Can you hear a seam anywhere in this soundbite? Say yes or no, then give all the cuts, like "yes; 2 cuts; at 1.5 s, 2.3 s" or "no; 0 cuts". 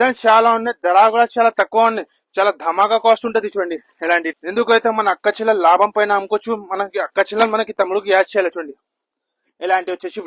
yes; 1 cut; at 4.3 s